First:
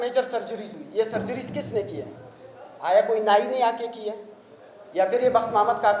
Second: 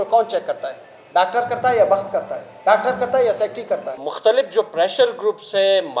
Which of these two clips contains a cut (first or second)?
second